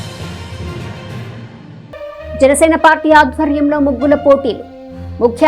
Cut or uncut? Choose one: cut